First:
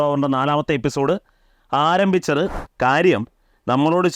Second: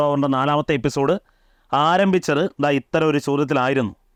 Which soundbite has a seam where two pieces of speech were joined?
first; 1 cut; at 2.5 s

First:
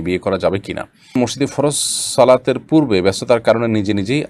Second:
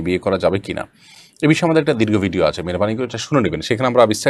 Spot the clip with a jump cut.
first; 1 cut; at 1.1 s

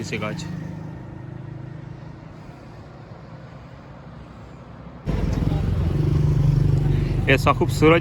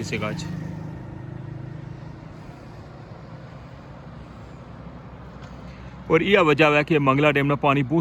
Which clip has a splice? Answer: first; 1 cut; at 5.1 s

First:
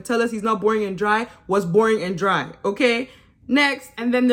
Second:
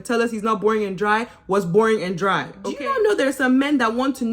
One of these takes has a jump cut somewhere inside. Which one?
second; 1 cut; at 2.6 s

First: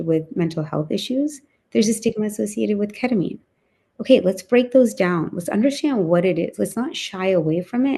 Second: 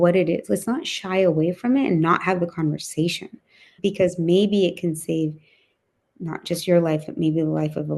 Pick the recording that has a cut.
second; 1 cut; at 3.6 s

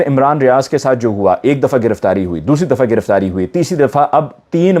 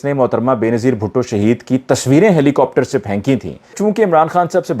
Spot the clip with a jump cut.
second; 1 cut; at 3.7 s

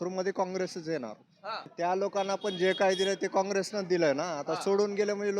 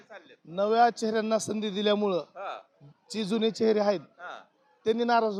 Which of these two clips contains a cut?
first; 1 cut; at 1.7 s

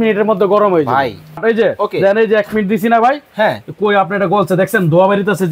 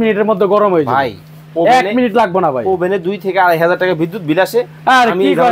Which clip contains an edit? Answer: first; 1 cut; at 1.4 s

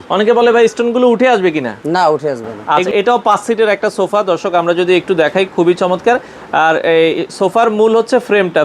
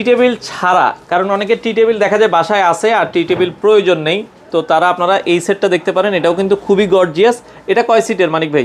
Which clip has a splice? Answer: first; 1 cut; at 2.5 s

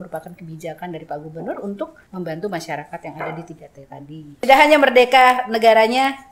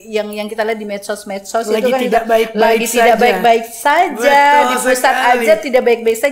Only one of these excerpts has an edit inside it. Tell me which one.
first; 2 cuts; at 2.0 s, 4.4 s

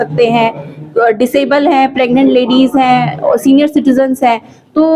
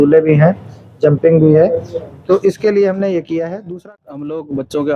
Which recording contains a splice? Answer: second; 1 cut; at 3.7 s

